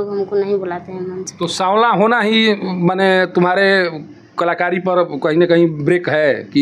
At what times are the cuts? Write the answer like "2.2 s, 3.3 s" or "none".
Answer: none